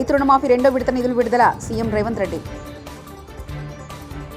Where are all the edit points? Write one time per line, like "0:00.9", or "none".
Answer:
none